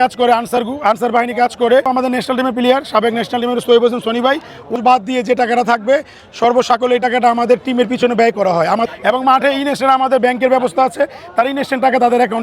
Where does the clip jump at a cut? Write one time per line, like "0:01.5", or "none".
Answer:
0:01.9
0:04.8
0:08.9